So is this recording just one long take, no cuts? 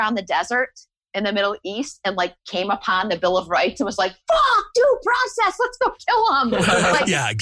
yes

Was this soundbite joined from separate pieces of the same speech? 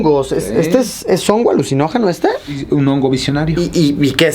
yes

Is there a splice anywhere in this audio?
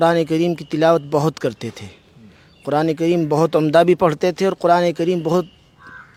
no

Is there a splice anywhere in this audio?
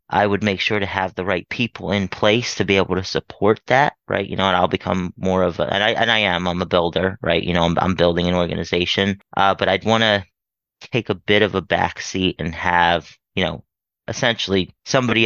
no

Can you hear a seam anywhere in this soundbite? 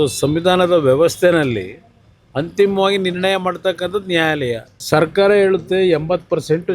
yes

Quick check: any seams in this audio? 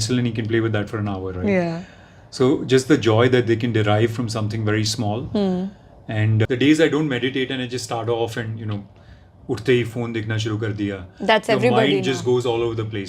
yes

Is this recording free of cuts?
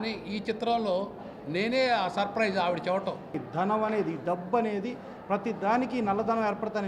no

